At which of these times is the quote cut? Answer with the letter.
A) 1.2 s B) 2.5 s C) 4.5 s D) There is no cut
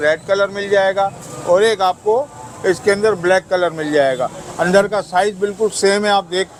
D